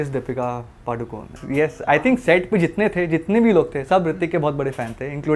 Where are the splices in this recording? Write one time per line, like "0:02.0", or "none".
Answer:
0:01.3